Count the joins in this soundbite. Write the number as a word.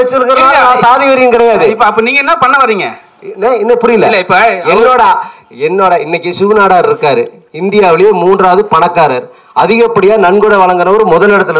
zero